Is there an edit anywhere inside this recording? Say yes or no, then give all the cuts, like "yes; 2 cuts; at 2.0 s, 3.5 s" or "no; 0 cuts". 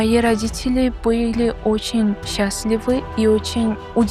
no; 0 cuts